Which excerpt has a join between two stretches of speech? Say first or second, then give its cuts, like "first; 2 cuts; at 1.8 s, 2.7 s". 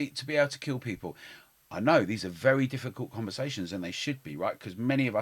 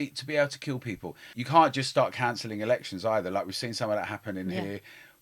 second; 1 cut; at 1.3 s